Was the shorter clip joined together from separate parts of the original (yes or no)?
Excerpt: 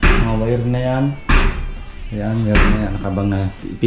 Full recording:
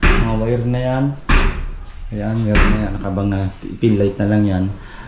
no